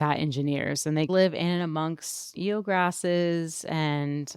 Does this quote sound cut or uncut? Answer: cut